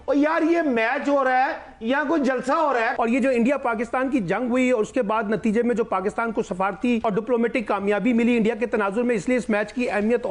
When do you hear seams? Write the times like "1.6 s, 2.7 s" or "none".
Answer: 2.9 s, 7.0 s